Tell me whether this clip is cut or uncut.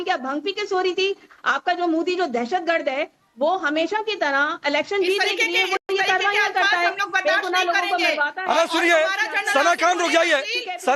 uncut